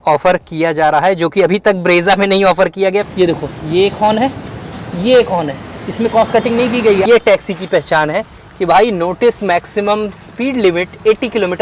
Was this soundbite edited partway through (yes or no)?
yes